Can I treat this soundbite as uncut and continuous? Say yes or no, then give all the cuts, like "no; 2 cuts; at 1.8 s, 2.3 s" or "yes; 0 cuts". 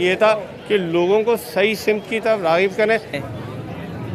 no; 1 cut; at 3.2 s